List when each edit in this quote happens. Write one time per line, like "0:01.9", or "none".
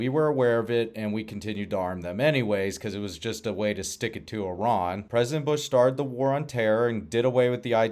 0:05.0